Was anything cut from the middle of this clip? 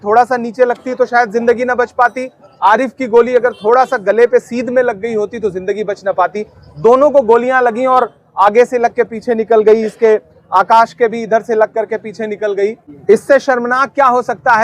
yes; 1 cut; at 12.9 s

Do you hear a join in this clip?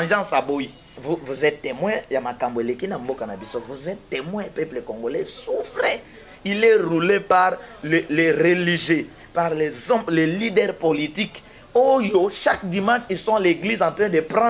yes; 1 cut; at 1.0 s

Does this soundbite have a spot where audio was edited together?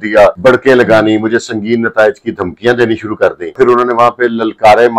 yes; 1 cut; at 3.6 s

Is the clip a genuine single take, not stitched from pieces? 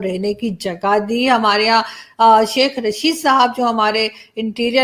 yes; 0 cuts

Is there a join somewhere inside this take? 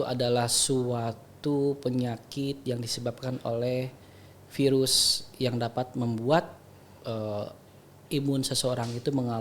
no; 0 cuts

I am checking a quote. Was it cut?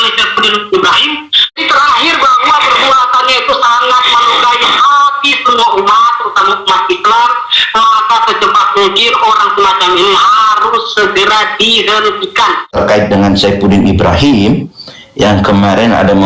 yes; 2 cuts; at 1.6 s, 12.7 s

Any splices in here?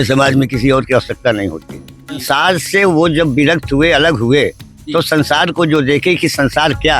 yes; 1 cut; at 2.2 s

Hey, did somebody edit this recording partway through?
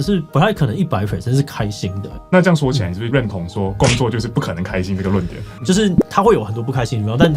yes; 3 cuts; at 2.1 s, 3.1 s, 5.5 s

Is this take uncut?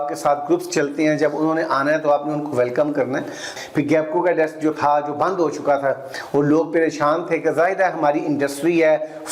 no; 1 cut; at 3.5 s

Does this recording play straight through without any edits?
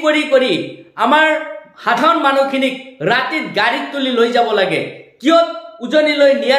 yes; 0 cuts

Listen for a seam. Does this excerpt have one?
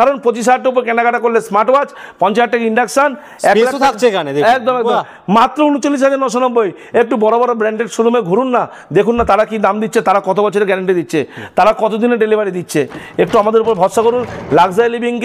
no; 0 cuts

